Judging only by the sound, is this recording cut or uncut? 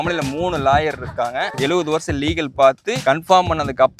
cut